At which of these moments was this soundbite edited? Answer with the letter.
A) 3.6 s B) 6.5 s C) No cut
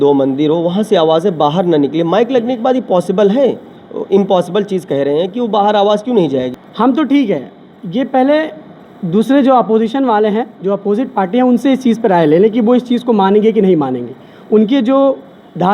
B